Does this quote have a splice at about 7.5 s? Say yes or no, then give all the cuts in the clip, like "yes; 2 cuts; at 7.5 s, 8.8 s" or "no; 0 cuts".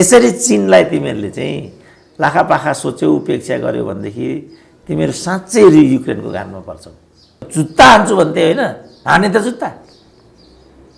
yes; 1 cut; at 7.5 s